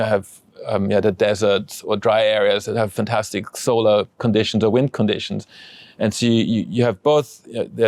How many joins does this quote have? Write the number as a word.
zero